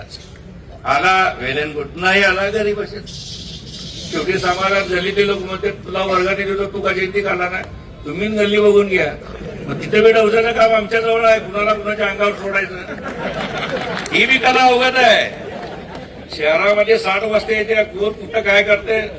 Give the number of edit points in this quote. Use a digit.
0